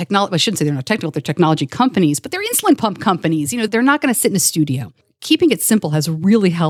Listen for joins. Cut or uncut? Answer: cut